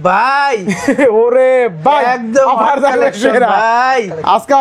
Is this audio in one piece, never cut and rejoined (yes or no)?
yes